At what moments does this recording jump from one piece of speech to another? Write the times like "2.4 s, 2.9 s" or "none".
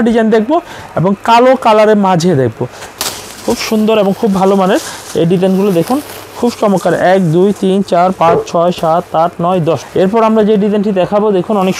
3.0 s, 9.8 s